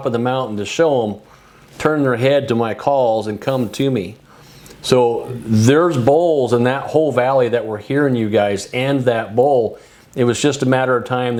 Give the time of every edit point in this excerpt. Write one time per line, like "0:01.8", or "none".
none